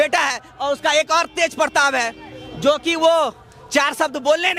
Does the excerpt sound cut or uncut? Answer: uncut